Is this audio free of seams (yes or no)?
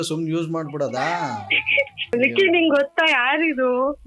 no